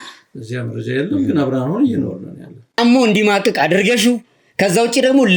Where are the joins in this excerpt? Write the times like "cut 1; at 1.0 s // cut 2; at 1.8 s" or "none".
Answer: cut 1; at 2.8 s